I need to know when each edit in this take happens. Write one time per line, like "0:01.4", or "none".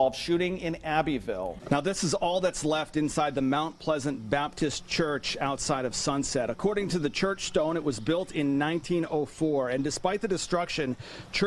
0:01.5